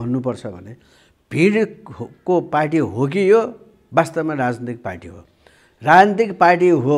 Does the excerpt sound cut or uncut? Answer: uncut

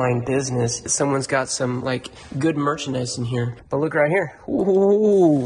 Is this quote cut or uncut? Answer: cut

